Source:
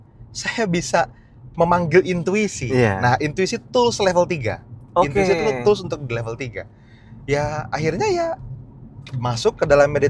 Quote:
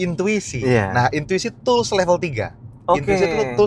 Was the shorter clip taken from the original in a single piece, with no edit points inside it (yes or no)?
yes